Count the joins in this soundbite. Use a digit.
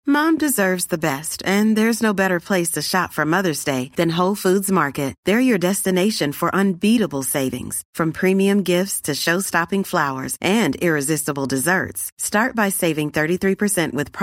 0